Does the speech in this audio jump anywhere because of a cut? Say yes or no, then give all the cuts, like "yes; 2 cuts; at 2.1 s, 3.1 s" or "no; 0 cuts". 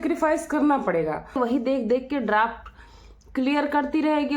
yes; 1 cut; at 1.4 s